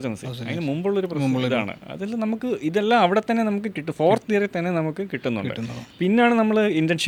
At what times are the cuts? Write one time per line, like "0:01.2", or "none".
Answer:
none